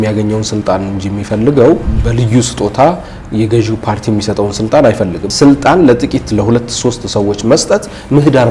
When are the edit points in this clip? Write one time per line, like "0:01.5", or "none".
0:01.9
0:05.3